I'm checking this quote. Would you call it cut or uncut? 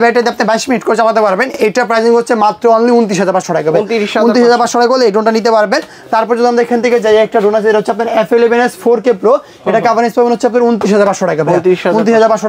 uncut